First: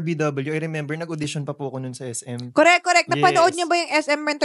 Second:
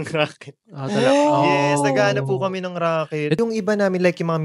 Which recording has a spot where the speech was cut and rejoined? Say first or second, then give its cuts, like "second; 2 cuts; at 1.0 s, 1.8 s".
second; 1 cut; at 3.4 s